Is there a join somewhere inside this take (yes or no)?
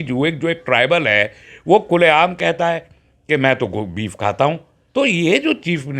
yes